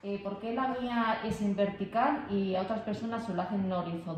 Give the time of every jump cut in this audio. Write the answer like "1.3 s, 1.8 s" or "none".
none